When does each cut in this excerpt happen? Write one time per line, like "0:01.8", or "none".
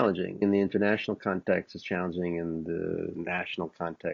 0:03.1